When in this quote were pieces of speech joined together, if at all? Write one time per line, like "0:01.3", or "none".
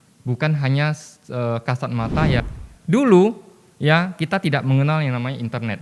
0:02.4